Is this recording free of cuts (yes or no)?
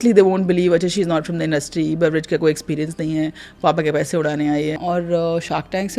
no